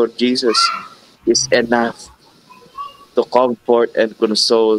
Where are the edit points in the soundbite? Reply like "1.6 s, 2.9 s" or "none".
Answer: none